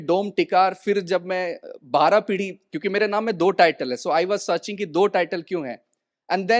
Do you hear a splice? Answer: no; 0 cuts

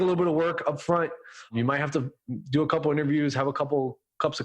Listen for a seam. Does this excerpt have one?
yes; 1 cut; at 1.5 s

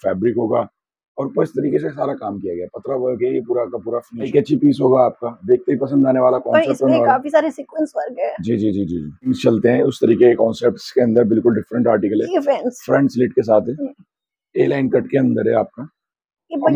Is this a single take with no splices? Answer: no; 2 cuts; at 4.3 s, 9.4 s

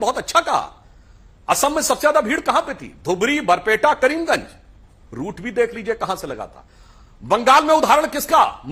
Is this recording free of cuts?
yes; 0 cuts

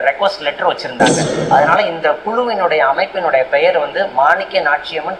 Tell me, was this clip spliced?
yes; 1 cut; at 1.3 s

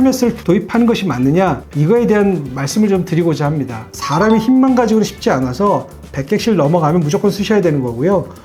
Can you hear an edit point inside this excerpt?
yes; 1 cut; at 4.0 s

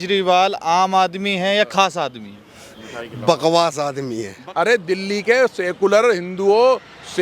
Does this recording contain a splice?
yes; 1 cut; at 4.4 s

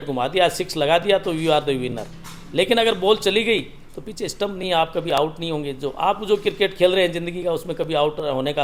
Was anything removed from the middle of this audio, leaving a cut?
no; 0 cuts

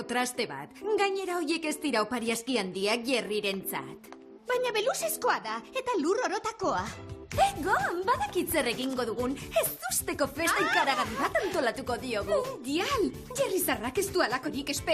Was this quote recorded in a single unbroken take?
no; 1 cut; at 3.7 s

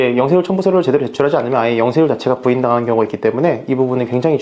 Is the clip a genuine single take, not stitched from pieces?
yes; 0 cuts

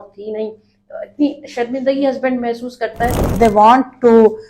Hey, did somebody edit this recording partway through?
yes; 1 cut; at 3.3 s

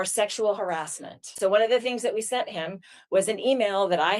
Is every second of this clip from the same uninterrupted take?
no; 1 cut; at 1.3 s

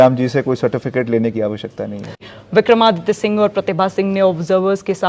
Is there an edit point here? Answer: yes; 1 cut; at 2.2 s

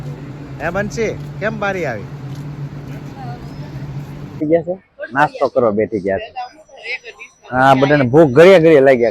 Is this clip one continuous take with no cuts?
no; 1 cut; at 4.4 s

